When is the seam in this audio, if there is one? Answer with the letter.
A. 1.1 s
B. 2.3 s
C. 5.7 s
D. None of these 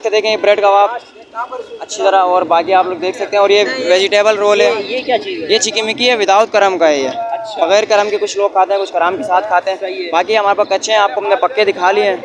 D